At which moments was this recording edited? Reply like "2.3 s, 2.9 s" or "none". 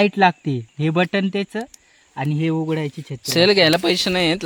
none